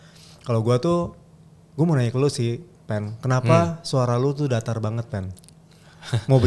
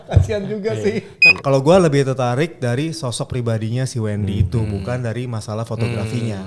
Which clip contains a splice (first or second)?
second